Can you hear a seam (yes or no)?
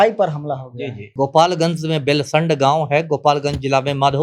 yes